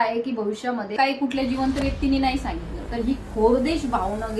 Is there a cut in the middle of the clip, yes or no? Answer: yes